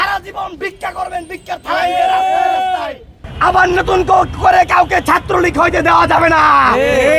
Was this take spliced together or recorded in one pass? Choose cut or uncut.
cut